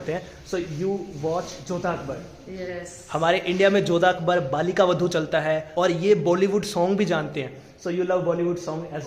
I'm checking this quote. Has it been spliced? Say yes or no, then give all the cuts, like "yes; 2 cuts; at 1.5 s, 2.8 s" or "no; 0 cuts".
yes; 1 cut; at 5.7 s